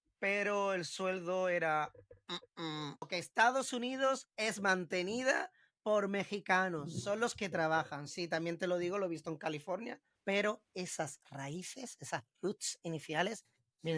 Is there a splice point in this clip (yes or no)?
yes